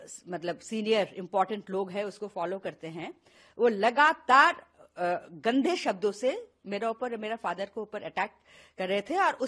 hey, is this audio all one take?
yes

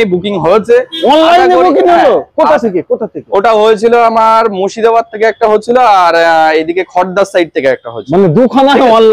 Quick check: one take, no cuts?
yes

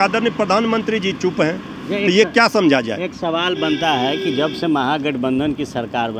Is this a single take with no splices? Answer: yes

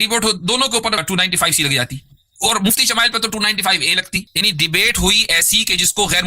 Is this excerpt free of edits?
no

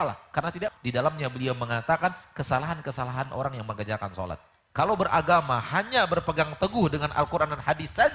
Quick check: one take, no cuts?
no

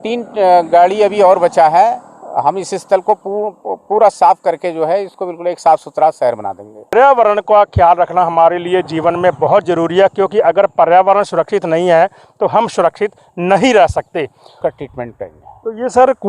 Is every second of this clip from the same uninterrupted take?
no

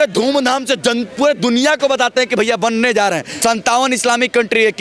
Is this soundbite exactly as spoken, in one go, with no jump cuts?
no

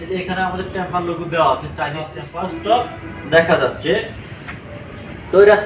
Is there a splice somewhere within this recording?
yes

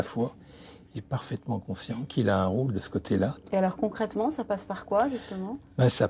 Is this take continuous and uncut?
no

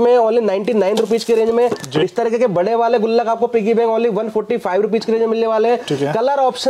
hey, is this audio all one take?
yes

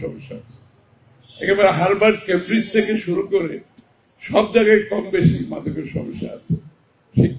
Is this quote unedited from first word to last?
yes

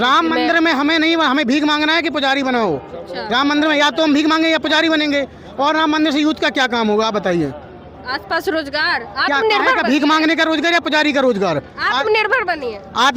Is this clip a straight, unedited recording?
yes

